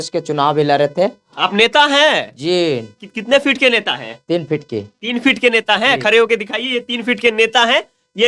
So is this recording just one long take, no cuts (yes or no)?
yes